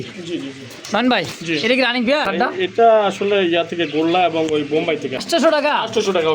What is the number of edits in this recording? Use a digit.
2